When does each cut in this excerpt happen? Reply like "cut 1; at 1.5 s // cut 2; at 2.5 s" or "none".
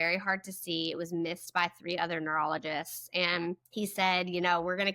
cut 1; at 3.6 s